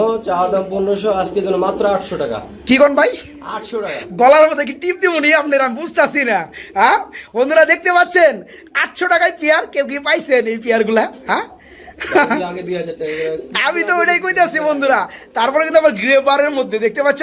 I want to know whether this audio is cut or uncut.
uncut